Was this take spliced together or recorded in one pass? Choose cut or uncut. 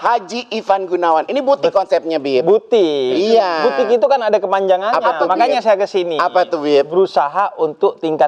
uncut